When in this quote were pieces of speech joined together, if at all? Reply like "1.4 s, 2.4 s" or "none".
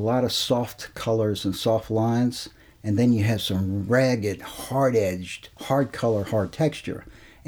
none